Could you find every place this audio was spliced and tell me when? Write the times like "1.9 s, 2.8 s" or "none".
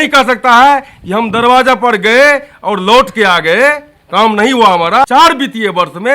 5.0 s